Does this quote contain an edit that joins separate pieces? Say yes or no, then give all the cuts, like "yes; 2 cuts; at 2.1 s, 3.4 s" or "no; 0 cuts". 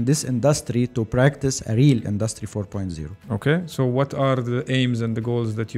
no; 0 cuts